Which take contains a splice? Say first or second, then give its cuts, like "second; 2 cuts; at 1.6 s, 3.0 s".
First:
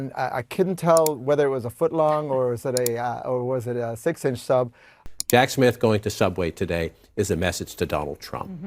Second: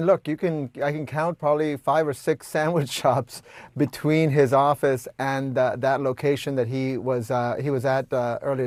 first; 1 cut; at 5.0 s